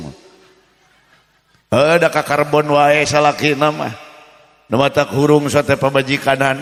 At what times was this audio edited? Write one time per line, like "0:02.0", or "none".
none